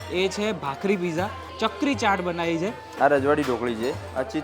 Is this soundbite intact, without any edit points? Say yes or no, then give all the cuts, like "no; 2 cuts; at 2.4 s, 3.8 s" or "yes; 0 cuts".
no; 2 cuts; at 1.4 s, 2.9 s